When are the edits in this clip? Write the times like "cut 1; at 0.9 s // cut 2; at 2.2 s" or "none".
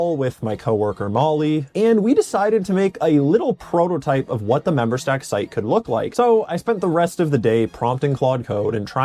cut 1; at 1.7 s // cut 2; at 6.1 s